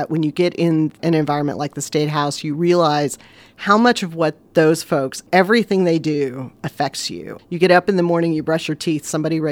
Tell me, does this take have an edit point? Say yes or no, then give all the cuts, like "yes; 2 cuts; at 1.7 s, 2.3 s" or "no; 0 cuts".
yes; 4 cuts; at 1.0 s, 4.4 s, 5.2 s, 7.2 s